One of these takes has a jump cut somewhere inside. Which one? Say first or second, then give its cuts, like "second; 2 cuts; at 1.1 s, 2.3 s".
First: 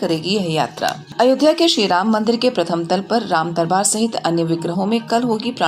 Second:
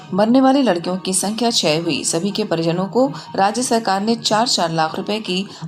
first; 1 cut; at 1.0 s